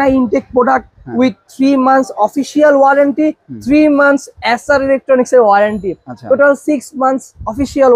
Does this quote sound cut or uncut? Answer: uncut